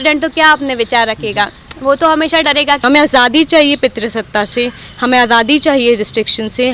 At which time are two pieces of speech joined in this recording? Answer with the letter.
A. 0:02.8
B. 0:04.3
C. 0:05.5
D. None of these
A